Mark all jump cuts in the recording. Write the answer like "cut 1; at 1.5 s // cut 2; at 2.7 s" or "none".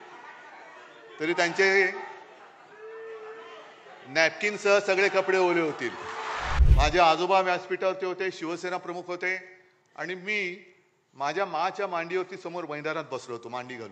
cut 1; at 6.5 s